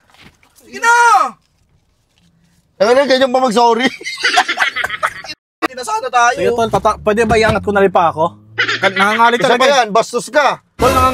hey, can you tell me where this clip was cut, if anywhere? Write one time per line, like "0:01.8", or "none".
0:05.7